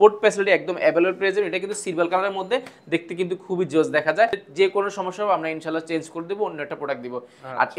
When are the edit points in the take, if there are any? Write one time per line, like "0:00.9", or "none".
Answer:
0:04.4